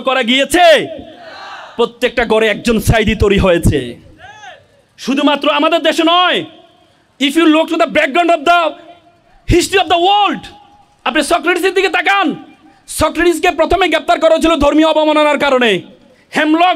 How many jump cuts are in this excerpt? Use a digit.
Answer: 0